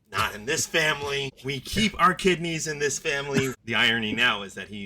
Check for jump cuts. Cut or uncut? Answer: cut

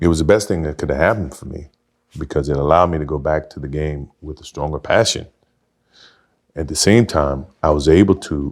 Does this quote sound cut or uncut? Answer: uncut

